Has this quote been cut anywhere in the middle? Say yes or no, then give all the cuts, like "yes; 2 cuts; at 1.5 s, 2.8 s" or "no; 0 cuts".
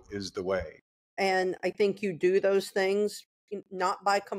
yes; 1 cut; at 1.1 s